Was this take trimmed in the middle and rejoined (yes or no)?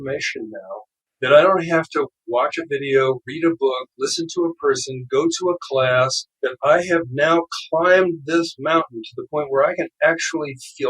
yes